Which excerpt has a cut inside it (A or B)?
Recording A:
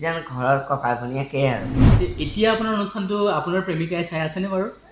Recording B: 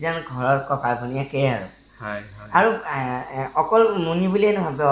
A